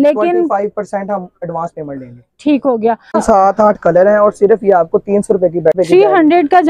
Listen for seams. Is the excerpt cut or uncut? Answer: cut